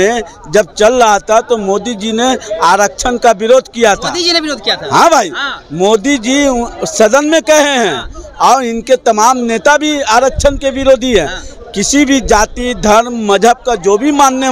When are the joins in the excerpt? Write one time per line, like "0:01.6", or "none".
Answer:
none